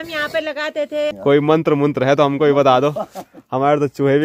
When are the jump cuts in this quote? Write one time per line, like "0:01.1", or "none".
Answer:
0:01.1